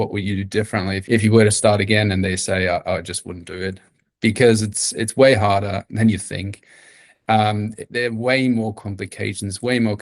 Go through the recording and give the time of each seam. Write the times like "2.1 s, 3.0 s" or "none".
1.0 s